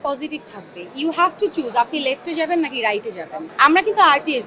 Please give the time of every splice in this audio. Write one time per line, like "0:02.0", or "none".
0:03.4